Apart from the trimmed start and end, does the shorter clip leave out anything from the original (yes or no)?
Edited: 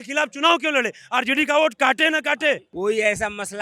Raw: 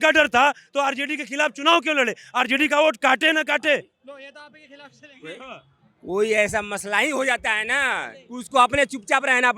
yes